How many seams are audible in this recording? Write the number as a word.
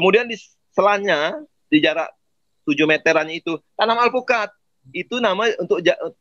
zero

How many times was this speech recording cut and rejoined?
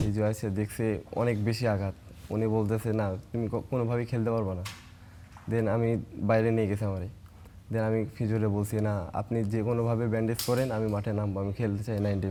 zero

